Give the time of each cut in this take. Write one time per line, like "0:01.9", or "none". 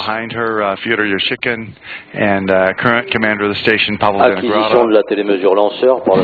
0:04.9